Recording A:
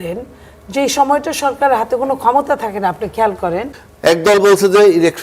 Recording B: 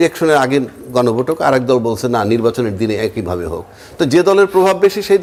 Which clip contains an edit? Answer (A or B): A